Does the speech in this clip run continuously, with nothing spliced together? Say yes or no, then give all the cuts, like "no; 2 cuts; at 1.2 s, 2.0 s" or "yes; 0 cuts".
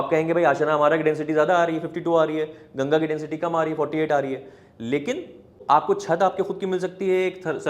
no; 1 cut; at 5.6 s